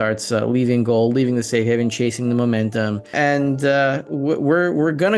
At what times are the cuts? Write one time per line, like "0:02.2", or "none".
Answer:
0:03.1